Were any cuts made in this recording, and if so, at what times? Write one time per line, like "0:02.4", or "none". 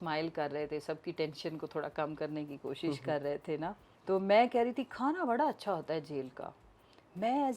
0:03.9